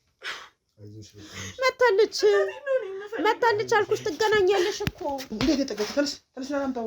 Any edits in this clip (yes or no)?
yes